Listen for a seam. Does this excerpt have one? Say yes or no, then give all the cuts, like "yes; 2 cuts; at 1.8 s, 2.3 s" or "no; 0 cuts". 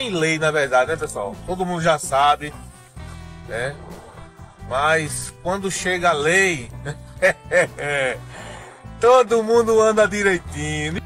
no; 0 cuts